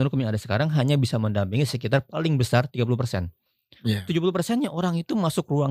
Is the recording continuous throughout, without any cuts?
yes; 0 cuts

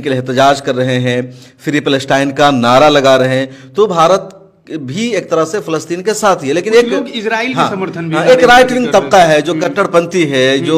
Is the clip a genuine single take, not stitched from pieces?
yes; 0 cuts

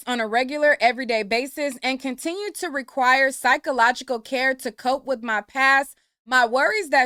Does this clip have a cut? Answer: no; 0 cuts

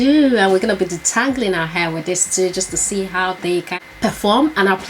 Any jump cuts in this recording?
yes; 1 cut; at 3.7 s

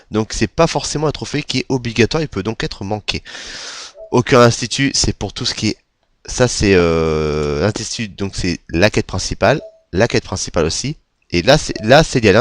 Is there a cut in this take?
yes; 1 cut; at 10.8 s

